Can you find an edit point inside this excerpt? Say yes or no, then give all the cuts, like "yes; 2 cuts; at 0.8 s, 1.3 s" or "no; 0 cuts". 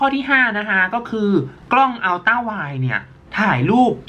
no; 0 cuts